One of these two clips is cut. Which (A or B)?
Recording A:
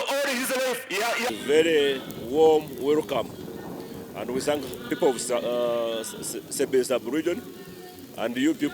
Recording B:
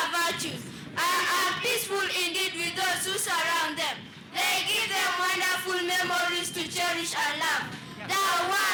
A